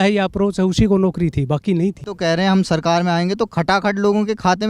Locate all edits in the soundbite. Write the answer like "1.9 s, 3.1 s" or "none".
2.1 s